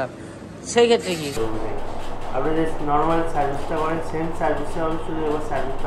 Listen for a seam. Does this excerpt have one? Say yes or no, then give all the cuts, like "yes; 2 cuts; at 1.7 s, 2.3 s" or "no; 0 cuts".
yes; 1 cut; at 1.3 s